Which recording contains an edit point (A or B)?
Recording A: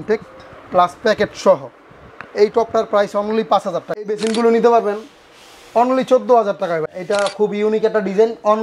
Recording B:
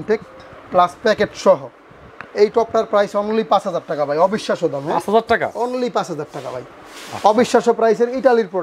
A